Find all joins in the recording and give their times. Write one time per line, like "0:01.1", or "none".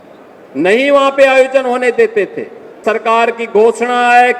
0:02.8